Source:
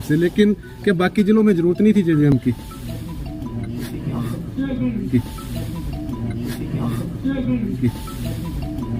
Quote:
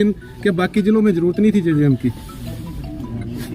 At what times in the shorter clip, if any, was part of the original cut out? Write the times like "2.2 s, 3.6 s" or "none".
1.9 s

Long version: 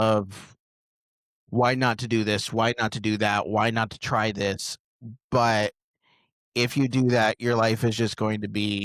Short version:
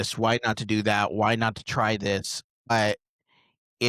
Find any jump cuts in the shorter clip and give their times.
2.7 s

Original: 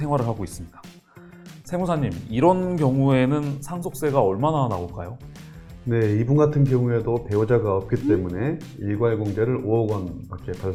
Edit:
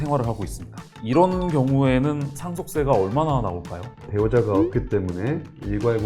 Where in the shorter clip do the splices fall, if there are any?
0.9 s, 4.1 s

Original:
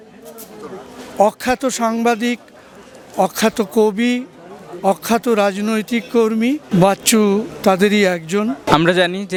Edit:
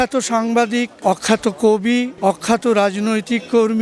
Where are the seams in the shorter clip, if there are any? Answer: 0.9 s, 2.1 s

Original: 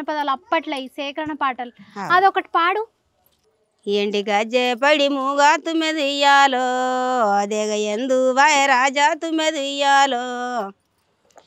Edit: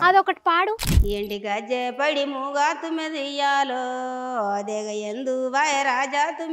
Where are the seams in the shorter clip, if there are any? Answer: 0.9 s

